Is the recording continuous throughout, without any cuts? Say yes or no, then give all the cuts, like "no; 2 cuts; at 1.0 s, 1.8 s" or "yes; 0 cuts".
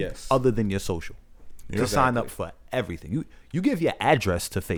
yes; 0 cuts